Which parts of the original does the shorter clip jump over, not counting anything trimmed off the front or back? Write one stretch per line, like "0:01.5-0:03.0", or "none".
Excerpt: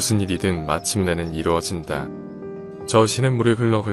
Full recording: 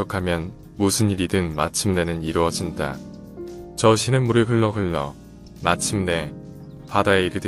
none